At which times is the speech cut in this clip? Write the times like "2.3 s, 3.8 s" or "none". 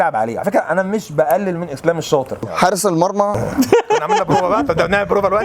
2.5 s